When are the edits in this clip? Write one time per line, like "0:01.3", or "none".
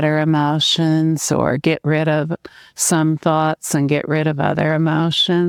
none